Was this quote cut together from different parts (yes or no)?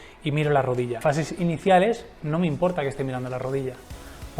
yes